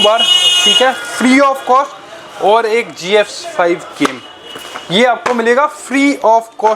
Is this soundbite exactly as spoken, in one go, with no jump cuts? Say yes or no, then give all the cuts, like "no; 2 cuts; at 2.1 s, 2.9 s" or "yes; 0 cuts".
yes; 0 cuts